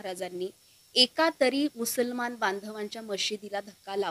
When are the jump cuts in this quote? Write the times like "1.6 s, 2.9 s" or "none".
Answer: none